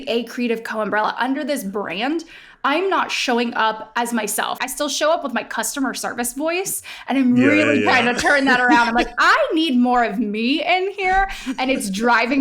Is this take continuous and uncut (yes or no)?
no